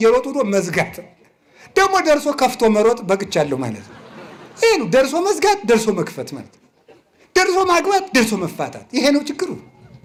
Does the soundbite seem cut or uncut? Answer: uncut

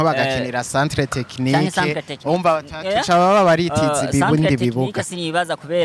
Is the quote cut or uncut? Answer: uncut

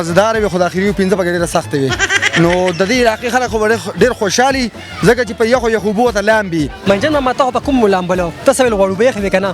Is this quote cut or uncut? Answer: cut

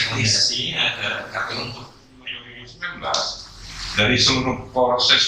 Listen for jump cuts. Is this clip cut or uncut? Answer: cut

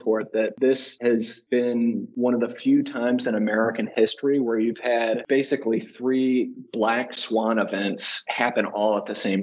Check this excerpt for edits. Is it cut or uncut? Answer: cut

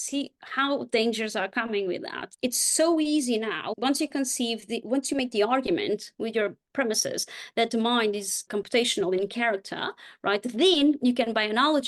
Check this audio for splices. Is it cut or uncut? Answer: cut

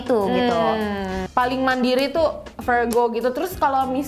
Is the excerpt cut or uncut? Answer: cut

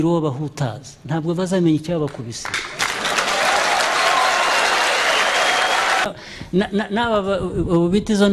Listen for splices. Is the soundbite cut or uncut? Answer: cut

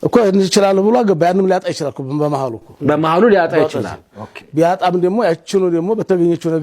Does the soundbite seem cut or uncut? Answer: uncut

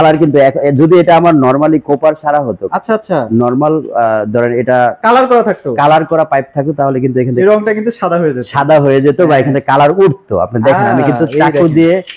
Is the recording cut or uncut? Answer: uncut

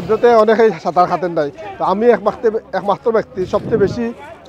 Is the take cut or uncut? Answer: uncut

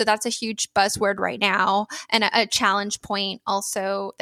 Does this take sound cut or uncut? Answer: uncut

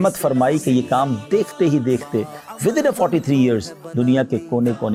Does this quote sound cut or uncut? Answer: uncut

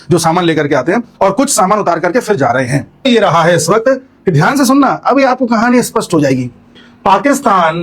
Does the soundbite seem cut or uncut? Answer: cut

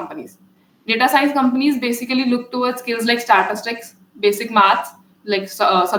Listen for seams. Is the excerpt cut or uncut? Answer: uncut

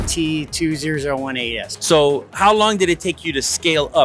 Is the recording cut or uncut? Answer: cut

